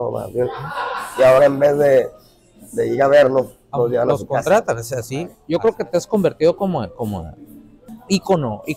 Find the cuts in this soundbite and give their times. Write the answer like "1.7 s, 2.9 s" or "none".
5.3 s